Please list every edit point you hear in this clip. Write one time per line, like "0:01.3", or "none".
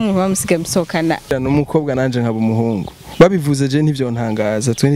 0:01.3